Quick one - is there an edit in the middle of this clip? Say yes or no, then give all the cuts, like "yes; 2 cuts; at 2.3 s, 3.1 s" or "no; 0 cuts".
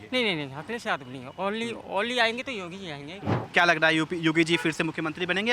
yes; 1 cut; at 3.4 s